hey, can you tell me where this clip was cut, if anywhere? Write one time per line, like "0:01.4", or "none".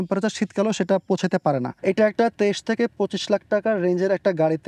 0:01.7